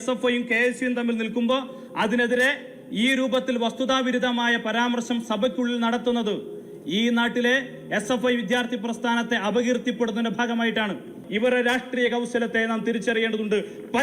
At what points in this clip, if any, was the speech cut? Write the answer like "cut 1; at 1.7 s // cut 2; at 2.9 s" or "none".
cut 1; at 11.2 s